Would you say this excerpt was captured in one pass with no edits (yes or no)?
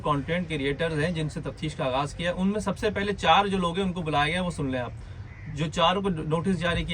yes